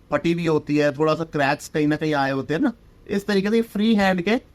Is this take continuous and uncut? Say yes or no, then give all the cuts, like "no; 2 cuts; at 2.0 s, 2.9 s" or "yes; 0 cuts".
yes; 0 cuts